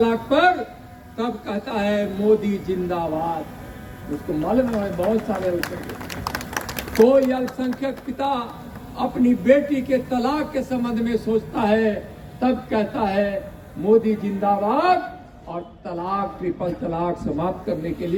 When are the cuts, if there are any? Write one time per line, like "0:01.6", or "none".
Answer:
none